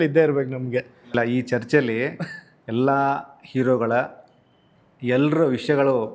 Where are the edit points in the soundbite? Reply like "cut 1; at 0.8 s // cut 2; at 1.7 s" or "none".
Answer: none